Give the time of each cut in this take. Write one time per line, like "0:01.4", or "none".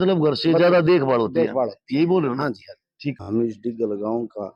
0:03.2